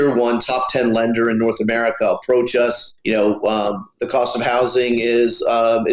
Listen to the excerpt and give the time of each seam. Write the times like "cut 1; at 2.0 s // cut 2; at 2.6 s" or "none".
cut 1; at 2.9 s // cut 2; at 3.9 s